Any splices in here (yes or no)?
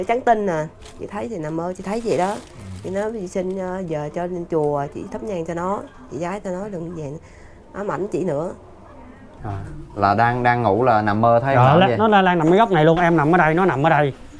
yes